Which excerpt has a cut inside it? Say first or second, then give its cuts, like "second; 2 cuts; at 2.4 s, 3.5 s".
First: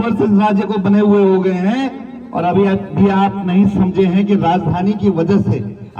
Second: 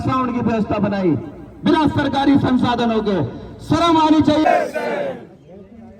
second; 1 cut; at 4.4 s